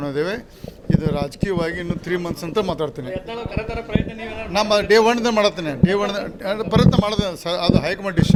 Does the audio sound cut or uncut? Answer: uncut